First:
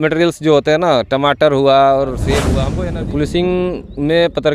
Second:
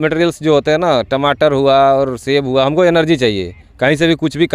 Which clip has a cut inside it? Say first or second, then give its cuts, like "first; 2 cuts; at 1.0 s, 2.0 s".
first; 1 cut; at 2.5 s